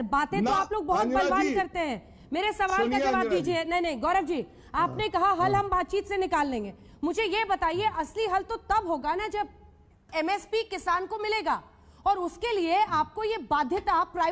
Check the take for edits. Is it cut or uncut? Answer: uncut